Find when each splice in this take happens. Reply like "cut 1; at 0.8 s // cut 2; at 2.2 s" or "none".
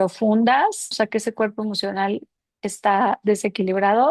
cut 1; at 0.9 s